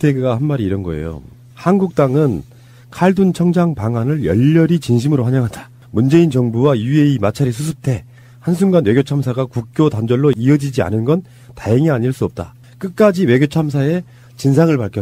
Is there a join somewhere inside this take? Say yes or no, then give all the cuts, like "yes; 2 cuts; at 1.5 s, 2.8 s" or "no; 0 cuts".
yes; 1 cut; at 11.8 s